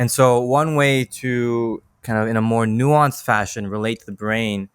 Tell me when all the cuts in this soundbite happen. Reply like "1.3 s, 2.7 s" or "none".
1.9 s